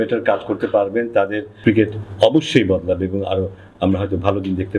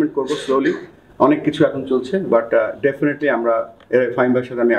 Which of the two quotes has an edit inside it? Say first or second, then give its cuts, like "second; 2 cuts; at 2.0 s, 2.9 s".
first; 1 cut; at 1.5 s